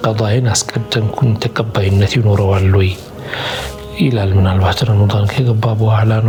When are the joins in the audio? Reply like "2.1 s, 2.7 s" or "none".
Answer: none

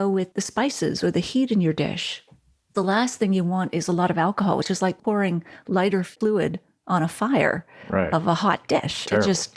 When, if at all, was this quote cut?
2.7 s

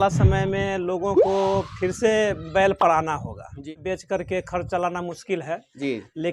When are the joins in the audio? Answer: 3.7 s

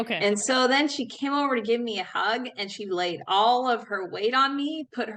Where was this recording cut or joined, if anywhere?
1.1 s

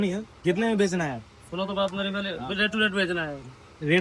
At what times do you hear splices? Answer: none

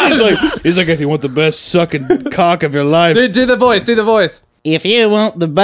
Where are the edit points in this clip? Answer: 4.5 s

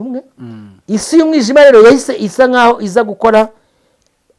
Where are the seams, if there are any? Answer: none

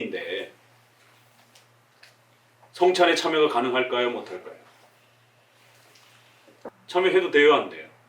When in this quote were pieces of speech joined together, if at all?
6.7 s

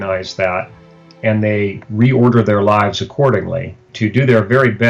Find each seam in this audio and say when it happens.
3.9 s

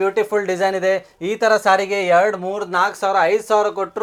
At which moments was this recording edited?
none

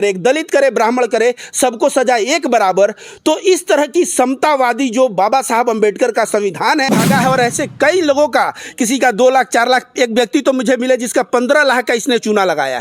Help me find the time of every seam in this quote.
6.9 s

